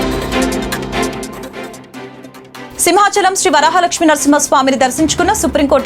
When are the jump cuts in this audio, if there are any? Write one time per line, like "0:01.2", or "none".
0:01.6
0:02.2